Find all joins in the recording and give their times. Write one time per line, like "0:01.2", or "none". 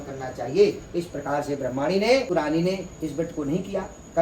0:02.3